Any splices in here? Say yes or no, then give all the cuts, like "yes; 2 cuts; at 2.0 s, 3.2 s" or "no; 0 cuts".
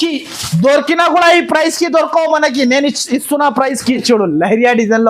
yes; 1 cut; at 4.0 s